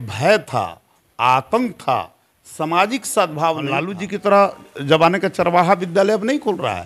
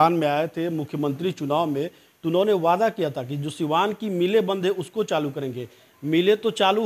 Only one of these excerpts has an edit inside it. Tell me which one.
first; 1 cut; at 3.9 s

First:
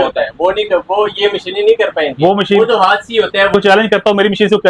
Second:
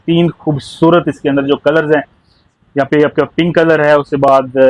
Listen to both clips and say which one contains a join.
first; 1 cut; at 3.5 s

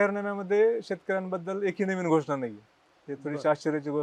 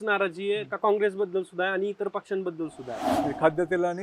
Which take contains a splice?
second; 1 cut; at 3.0 s

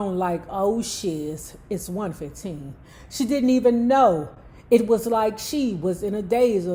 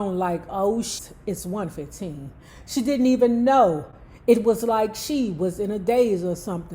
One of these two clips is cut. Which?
second; 1 cut; at 1.0 s

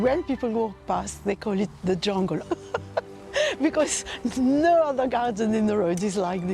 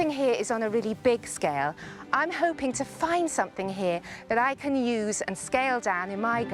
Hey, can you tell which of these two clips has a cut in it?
first; 1 cut; at 2.4 s

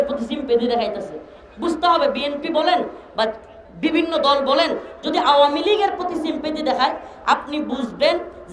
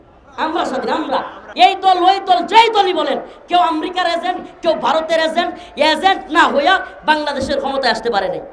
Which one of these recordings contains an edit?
second; 1 cut; at 1.4 s

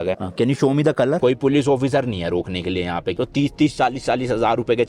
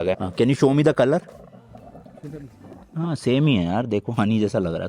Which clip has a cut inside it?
first; 2 cuts; at 1.2 s, 3.1 s

